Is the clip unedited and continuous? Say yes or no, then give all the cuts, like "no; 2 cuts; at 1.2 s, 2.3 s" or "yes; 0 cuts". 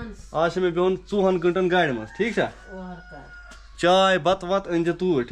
yes; 0 cuts